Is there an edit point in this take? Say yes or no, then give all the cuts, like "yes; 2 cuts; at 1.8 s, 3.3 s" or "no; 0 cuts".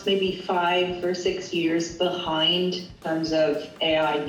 yes; 1 cut; at 3.0 s